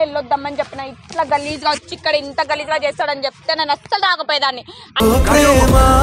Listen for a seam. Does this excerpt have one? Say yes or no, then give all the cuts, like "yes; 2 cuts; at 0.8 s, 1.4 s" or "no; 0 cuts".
yes; 1 cut; at 4.8 s